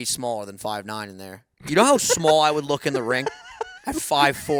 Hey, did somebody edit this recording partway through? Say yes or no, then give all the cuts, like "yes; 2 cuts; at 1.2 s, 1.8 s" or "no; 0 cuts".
no; 0 cuts